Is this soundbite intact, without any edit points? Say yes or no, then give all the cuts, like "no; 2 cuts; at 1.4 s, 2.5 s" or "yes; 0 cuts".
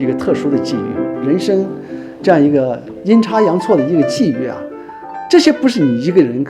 no; 1 cut; at 1.1 s